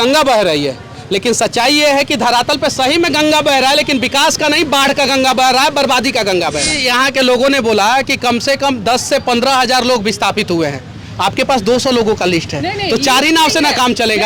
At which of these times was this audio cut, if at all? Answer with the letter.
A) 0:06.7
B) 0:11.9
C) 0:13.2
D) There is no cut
A